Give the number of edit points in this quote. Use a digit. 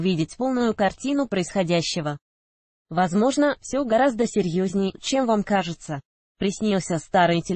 0